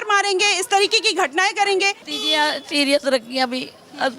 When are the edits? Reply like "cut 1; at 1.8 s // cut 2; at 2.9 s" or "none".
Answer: cut 1; at 2.1 s